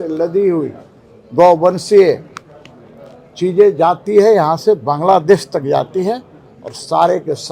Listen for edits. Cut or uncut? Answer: uncut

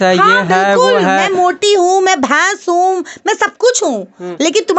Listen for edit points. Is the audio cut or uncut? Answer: uncut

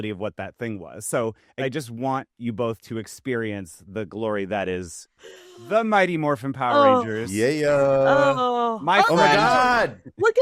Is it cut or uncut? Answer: uncut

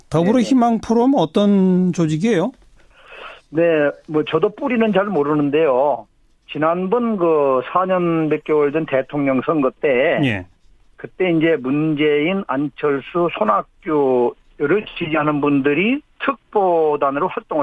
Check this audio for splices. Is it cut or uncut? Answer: cut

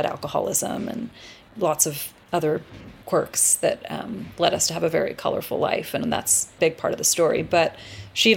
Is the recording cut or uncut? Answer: cut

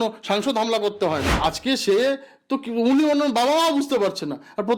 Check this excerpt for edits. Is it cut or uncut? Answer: cut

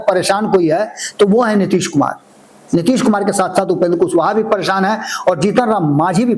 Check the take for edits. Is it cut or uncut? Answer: uncut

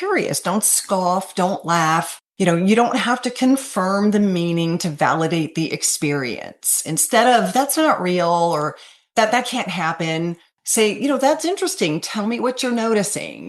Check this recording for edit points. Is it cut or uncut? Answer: cut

